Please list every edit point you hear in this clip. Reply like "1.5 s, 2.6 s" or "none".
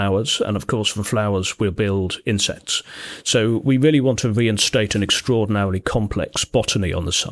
none